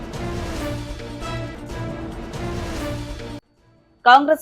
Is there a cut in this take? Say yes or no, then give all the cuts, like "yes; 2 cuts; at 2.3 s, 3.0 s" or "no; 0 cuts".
yes; 2 cuts; at 1.0 s, 3.1 s